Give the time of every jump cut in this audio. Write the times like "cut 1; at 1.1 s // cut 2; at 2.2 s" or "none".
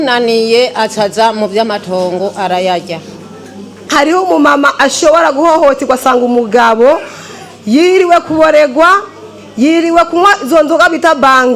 cut 1; at 3.8 s